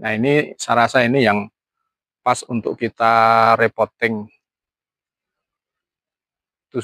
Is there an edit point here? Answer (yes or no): no